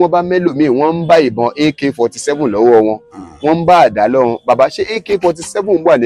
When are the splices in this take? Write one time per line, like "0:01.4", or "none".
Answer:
none

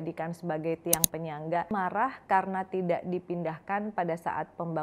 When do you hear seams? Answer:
0:01.7

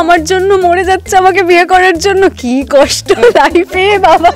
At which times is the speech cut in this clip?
none

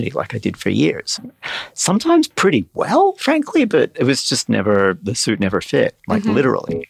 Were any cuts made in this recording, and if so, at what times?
0:01.1

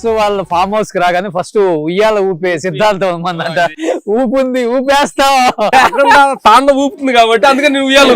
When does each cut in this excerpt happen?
0:03.7
0:05.7

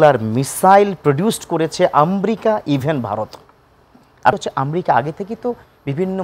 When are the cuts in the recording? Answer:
0:04.3

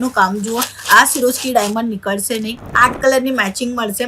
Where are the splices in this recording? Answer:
0:02.6

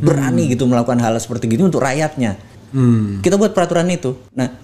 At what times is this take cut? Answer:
0:02.5

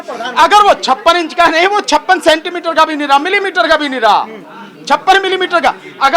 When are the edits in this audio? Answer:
none

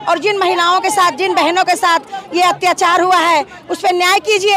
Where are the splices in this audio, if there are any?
none

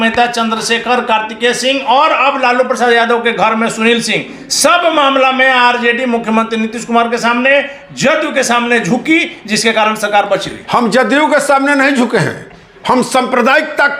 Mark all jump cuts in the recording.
none

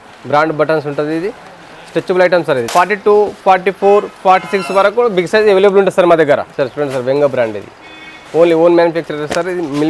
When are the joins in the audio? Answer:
0:02.6
0:06.6

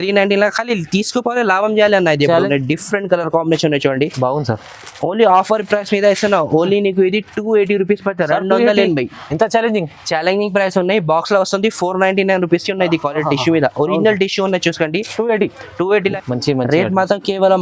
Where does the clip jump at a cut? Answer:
0:02.5
0:16.1

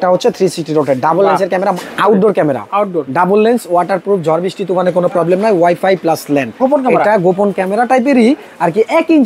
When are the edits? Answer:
0:01.8
0:06.6

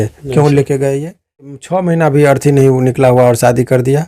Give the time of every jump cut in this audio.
0:01.5

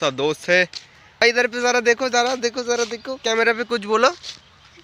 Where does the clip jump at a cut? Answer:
0:01.2

